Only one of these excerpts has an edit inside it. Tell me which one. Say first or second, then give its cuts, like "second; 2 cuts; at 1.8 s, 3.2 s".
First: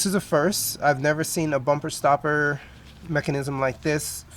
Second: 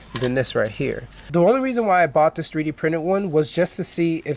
second; 1 cut; at 1.2 s